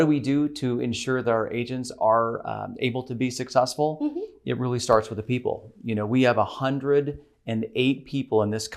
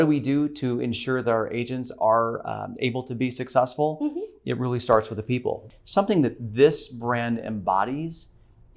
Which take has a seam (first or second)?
second